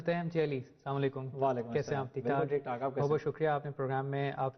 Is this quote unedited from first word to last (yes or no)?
no